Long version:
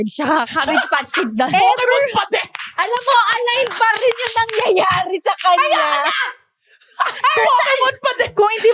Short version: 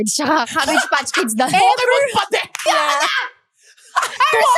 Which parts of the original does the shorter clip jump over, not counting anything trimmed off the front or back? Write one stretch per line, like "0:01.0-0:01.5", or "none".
0:02.6-0:05.7